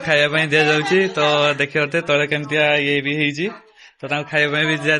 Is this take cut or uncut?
uncut